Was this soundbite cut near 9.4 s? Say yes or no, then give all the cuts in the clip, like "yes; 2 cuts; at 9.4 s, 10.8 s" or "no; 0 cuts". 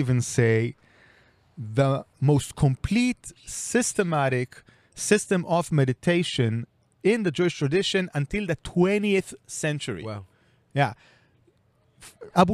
no; 2 cuts; at 2.1 s, 6.9 s